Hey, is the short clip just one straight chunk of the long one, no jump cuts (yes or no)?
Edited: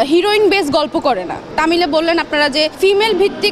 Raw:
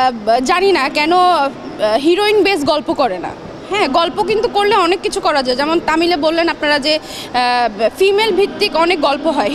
no